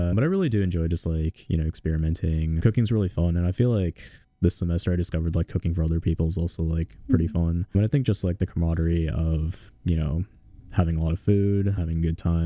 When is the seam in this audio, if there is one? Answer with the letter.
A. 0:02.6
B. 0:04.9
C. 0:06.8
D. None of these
A